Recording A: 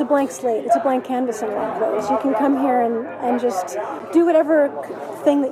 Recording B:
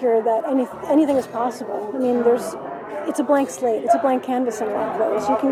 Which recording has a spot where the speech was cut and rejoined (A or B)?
A